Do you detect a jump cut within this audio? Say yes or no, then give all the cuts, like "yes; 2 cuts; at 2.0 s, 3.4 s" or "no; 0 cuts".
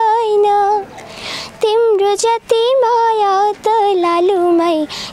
no; 0 cuts